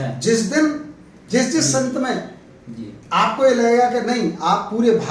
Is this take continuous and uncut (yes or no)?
yes